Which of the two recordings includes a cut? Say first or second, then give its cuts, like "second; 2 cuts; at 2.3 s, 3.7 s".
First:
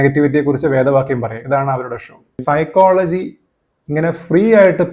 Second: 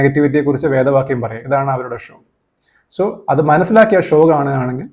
first; 1 cut; at 2.4 s